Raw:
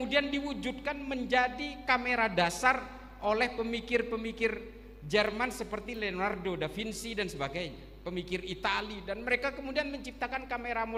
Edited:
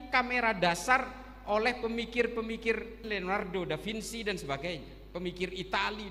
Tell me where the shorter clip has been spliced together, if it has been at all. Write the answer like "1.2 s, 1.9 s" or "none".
3.0 s